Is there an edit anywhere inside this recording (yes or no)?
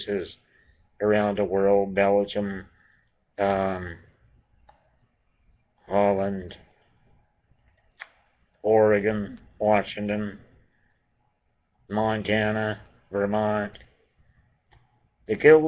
yes